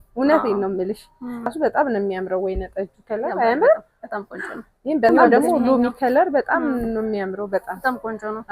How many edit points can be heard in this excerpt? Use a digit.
2